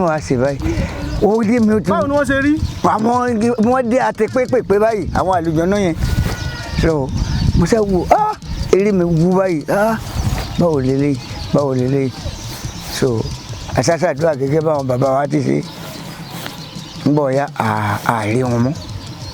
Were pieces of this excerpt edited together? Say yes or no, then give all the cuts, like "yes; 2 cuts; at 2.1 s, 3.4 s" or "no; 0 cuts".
no; 0 cuts